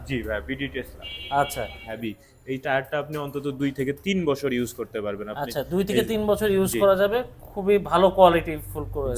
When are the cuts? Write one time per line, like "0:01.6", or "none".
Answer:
0:01.9

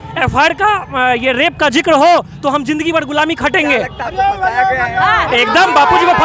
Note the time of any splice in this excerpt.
none

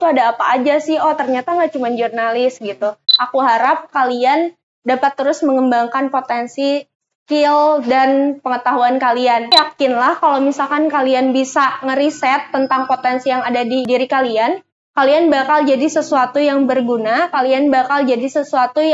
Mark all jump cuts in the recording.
0:03.2
0:09.5
0:13.9

